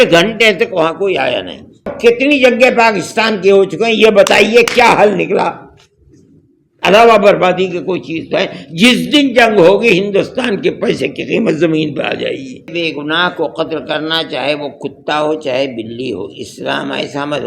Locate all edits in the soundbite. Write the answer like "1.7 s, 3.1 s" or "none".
1.9 s, 12.7 s